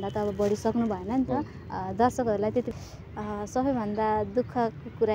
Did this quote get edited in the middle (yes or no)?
yes